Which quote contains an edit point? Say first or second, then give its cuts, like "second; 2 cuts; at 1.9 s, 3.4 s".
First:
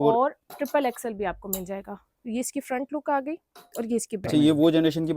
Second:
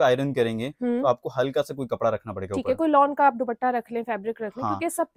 first; 1 cut; at 4.2 s